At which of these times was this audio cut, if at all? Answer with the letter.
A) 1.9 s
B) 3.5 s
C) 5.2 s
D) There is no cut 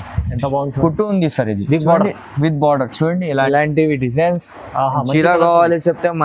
B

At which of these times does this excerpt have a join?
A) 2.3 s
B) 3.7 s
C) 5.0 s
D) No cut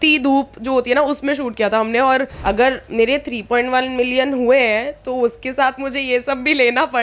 A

